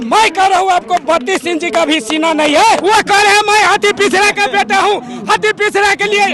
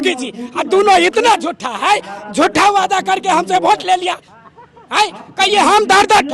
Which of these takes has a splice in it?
first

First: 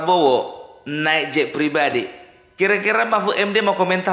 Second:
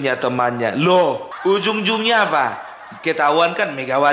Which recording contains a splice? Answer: second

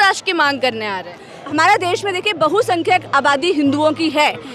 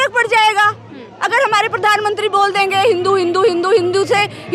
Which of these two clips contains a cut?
first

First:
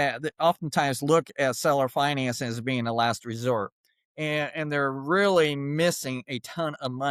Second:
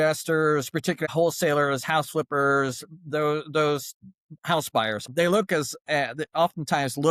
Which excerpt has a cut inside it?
second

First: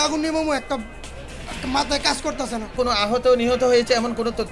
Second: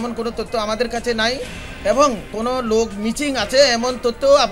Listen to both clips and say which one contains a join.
first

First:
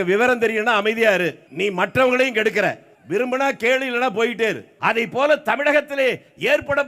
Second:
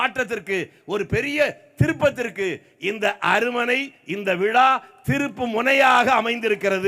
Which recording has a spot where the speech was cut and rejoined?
first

